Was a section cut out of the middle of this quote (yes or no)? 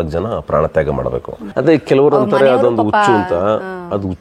yes